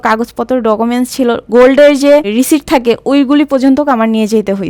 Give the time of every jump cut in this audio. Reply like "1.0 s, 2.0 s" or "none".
none

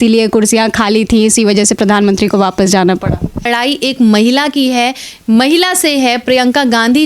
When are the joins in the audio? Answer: 3.5 s

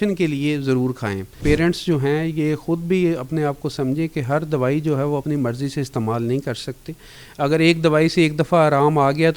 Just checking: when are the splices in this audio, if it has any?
1.4 s

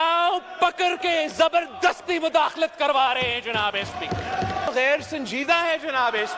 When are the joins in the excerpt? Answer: 4.7 s

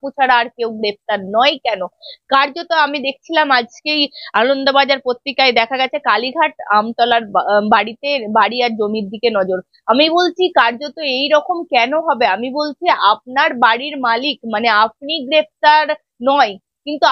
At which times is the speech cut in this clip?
none

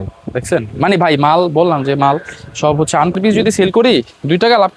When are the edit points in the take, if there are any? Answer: 3.1 s

